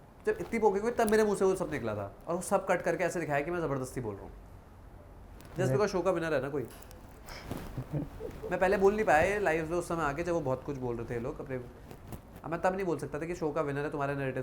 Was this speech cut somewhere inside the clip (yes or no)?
no